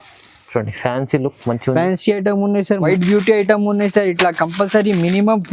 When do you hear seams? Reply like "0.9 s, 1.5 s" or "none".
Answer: 2.9 s